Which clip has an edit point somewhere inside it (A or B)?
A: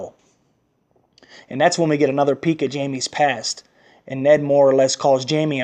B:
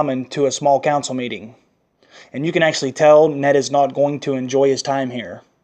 B